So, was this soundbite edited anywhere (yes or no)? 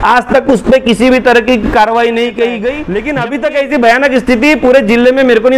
yes